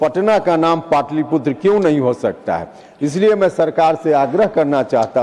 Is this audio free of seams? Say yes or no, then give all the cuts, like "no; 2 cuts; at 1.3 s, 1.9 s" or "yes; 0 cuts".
yes; 0 cuts